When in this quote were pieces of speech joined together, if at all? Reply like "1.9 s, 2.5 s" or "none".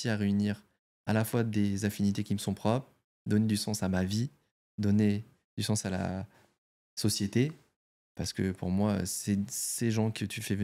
none